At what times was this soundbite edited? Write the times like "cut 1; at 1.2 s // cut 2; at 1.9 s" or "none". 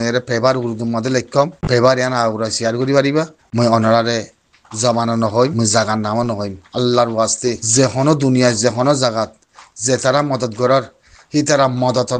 cut 1; at 1.6 s // cut 2; at 3.4 s // cut 3; at 5.5 s // cut 4; at 7.6 s